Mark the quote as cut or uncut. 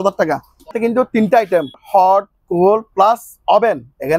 cut